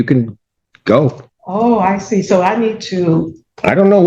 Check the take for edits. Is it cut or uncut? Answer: cut